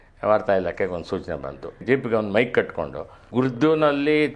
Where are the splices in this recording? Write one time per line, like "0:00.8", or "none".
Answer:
0:01.8
0:03.2